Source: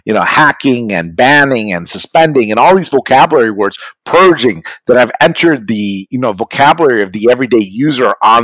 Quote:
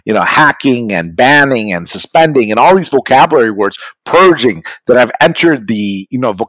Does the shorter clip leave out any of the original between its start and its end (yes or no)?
no